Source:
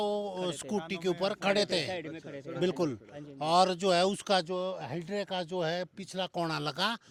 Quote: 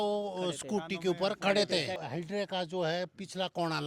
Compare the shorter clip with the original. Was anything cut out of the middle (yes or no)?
yes